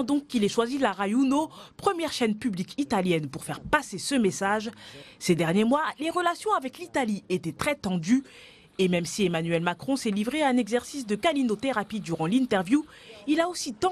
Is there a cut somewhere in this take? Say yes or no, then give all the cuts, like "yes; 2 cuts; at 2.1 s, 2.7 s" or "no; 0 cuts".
yes; 1 cut; at 11.2 s